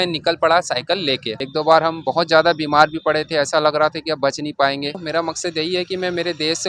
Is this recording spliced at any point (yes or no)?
yes